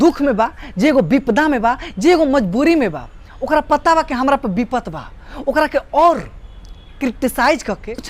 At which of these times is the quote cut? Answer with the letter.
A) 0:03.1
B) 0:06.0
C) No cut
C